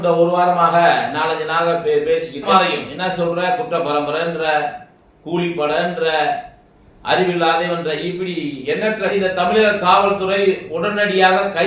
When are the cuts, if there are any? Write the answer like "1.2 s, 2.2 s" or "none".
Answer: 2.5 s, 9.1 s